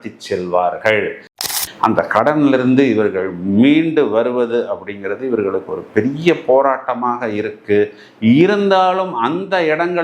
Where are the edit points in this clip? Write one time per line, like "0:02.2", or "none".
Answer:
0:01.3